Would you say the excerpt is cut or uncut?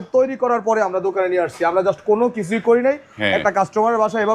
uncut